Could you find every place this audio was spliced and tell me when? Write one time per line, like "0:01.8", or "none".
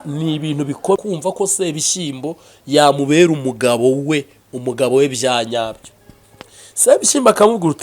0:01.0